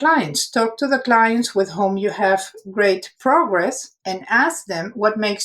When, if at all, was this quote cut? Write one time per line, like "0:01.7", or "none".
0:03.9